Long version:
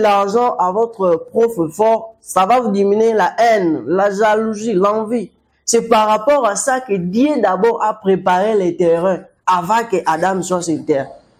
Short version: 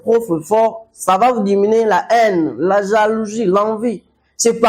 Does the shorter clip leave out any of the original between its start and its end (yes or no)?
no